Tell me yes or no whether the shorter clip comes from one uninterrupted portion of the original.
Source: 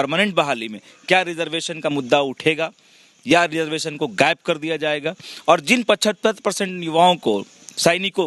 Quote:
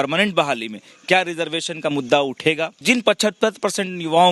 no